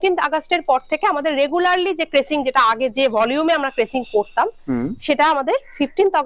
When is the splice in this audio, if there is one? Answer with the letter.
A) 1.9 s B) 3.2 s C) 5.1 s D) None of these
D